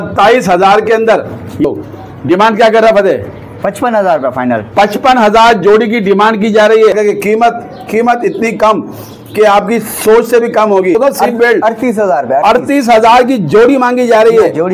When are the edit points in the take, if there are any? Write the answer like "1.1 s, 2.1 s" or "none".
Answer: 1.6 s, 6.9 s, 11.0 s